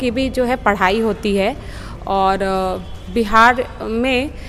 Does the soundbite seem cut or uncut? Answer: uncut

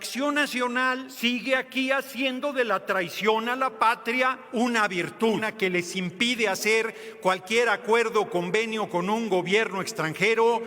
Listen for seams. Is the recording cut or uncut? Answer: cut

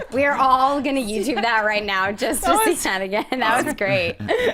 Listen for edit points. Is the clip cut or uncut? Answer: uncut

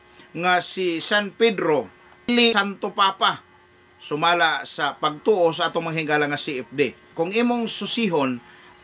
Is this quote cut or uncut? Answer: cut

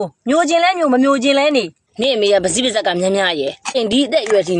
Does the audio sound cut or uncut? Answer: cut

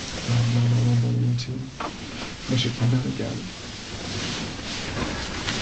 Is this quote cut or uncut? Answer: uncut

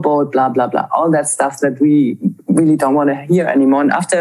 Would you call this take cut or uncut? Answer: uncut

